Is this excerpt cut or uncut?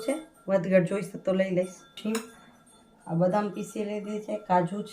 cut